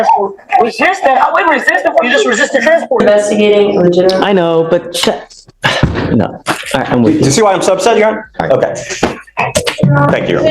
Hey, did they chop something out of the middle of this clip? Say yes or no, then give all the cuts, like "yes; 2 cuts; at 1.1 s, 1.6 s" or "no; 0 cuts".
yes; 1 cut; at 3.0 s